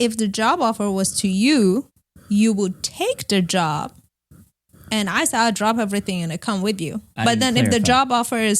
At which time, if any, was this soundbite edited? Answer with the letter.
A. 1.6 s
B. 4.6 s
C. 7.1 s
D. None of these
C